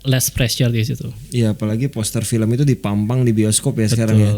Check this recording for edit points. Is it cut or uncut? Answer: cut